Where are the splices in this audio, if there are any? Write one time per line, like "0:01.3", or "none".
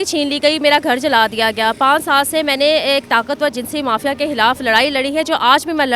none

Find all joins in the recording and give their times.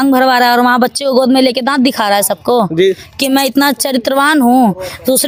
none

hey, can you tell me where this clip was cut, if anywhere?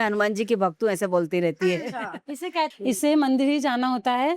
0:02.7

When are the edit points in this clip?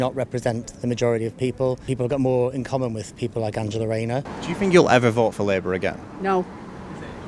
0:01.9
0:04.3

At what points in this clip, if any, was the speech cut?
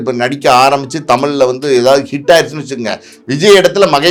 none

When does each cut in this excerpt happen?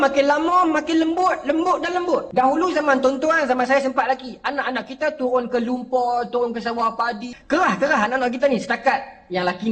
0:02.3
0:07.3

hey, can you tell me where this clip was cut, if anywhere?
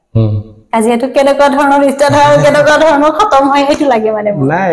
none

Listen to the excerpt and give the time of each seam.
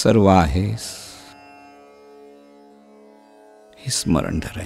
none

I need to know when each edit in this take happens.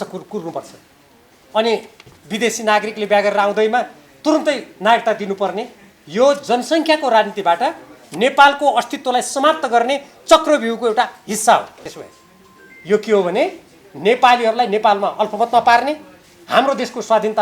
0:11.9

